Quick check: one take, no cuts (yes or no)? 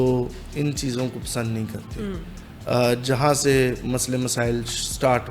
yes